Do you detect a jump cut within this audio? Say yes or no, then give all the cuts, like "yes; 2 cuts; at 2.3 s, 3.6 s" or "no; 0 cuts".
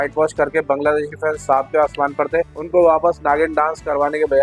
no; 0 cuts